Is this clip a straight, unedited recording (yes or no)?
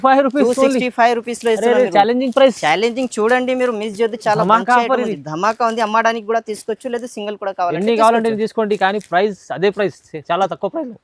yes